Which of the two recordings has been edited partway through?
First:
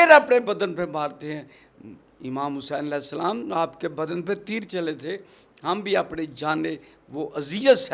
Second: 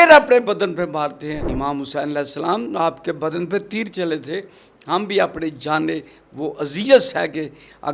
second; 1 cut; at 1.4 s

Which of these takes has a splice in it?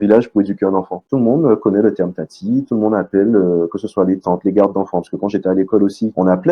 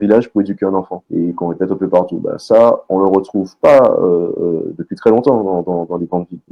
first; 1 cut; at 1.0 s

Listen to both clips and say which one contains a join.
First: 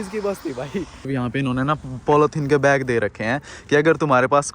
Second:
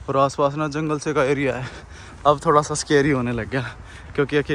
first; 1 cut; at 1.1 s

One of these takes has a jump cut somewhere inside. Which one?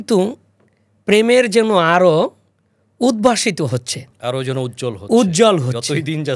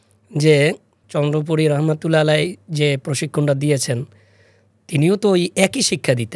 second; 1 cut; at 1.0 s

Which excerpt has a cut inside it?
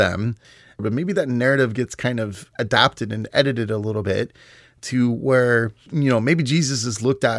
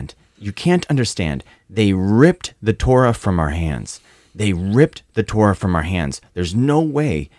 first; 3 cuts; at 0.8 s, 2.4 s, 5.8 s

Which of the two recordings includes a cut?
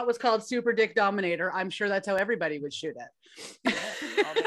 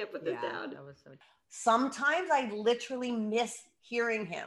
second; 1 cut; at 1.4 s

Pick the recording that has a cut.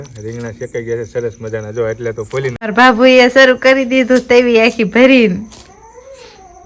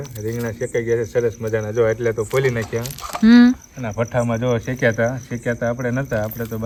first; 1 cut; at 2.7 s

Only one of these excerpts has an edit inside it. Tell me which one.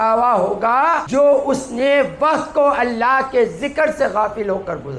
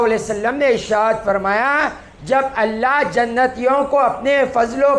first; 1 cut; at 1.0 s

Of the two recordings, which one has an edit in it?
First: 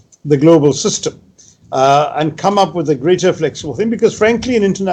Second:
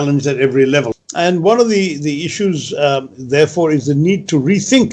second; 1 cut; at 0.9 s

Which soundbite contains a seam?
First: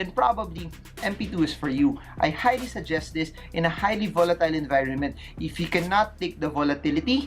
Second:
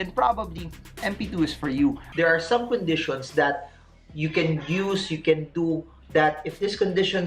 second; 1 cut; at 2.0 s

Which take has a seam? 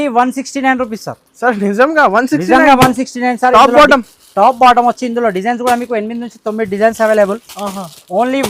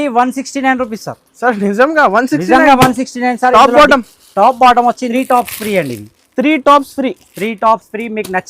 second; 1 cut; at 5.1 s

